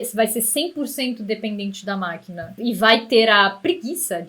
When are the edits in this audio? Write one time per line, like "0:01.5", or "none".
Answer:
0:02.6